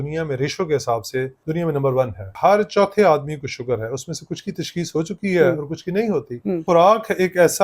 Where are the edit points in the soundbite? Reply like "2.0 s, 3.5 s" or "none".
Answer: 1.4 s, 2.3 s, 6.6 s